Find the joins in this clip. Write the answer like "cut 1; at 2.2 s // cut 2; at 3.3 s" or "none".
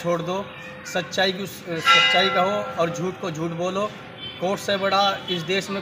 none

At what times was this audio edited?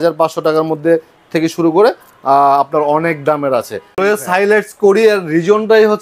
cut 1; at 4.0 s

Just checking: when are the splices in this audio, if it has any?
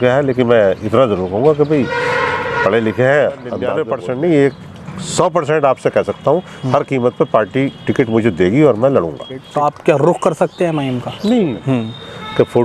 cut 1; at 3.6 s // cut 2; at 9.3 s // cut 3; at 11.6 s

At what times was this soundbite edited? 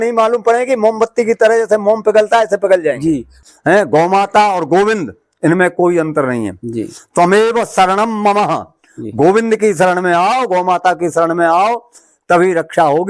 cut 1; at 3.3 s

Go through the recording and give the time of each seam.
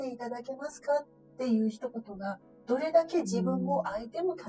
none

